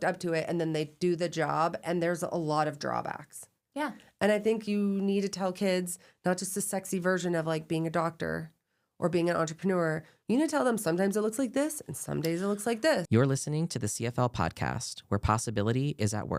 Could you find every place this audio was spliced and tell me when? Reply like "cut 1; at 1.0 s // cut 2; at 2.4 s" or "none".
cut 1; at 13.1 s

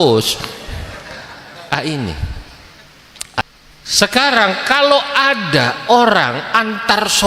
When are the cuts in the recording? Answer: cut 1; at 3.4 s

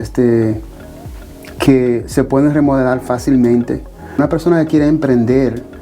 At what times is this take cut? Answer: cut 1; at 4.2 s

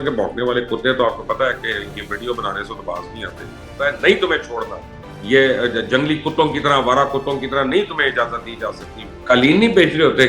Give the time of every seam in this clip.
cut 1; at 3.7 s // cut 2; at 9.2 s

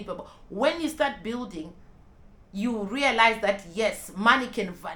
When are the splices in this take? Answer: none

